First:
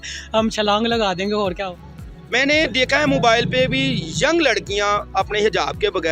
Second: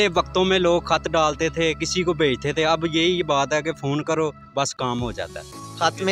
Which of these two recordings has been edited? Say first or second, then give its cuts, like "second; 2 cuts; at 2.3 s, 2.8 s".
first; 1 cut; at 1.6 s